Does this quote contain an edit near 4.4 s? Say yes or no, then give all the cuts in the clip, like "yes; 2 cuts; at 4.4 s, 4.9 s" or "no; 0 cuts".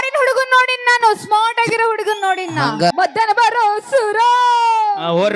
no; 1 cut; at 2.9 s